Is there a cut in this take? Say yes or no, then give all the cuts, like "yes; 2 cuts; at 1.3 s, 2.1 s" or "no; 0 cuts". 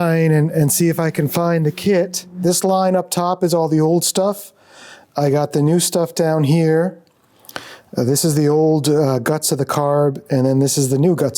yes; 1 cut; at 2.4 s